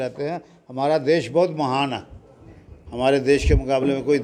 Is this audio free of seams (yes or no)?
yes